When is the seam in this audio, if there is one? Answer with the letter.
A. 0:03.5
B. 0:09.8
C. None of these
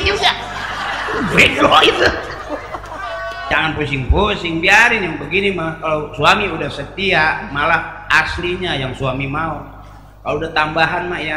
A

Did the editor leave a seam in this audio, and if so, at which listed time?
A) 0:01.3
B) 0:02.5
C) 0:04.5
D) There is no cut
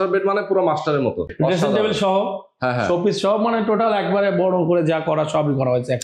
A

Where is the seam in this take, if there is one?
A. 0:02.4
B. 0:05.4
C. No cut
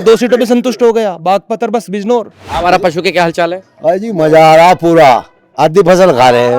A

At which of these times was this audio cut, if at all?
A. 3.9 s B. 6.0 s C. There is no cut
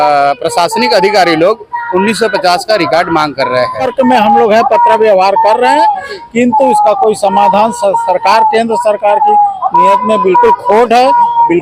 A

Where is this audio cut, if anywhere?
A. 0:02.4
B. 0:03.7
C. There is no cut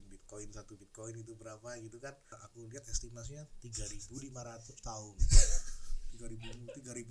A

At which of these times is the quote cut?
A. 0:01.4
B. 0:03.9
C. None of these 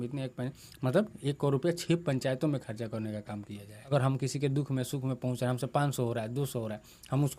B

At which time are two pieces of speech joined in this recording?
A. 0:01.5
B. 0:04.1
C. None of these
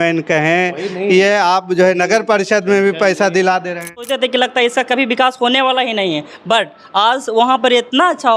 B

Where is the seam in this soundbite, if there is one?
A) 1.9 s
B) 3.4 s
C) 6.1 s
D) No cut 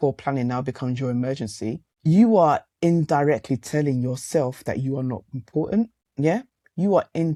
D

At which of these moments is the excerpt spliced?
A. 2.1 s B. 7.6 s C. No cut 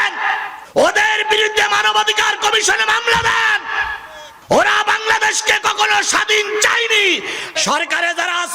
B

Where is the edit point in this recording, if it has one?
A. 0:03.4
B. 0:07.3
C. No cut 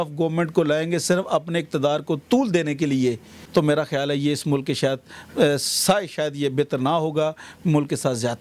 A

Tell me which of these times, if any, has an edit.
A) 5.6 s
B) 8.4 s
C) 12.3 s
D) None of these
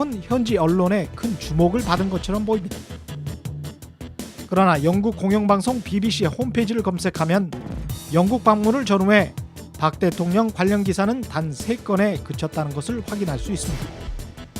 C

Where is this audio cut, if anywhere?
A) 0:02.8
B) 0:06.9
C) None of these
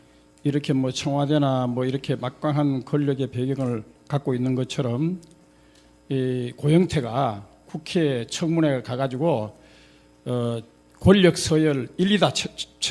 A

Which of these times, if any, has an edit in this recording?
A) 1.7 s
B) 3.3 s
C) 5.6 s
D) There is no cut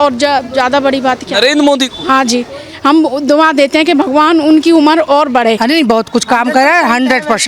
C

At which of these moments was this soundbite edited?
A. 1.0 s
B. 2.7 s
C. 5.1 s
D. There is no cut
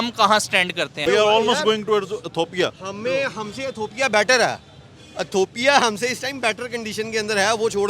A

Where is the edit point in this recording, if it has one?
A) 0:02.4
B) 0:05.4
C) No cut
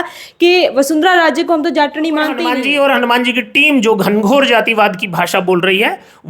A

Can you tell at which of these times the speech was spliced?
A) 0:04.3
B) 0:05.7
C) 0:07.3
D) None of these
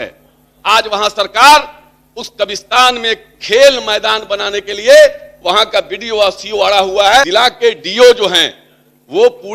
C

